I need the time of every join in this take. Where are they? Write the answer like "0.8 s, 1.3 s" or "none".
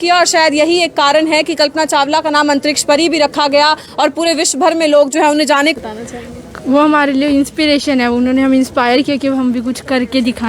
5.8 s